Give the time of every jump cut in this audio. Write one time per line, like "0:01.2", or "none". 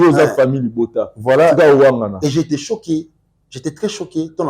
none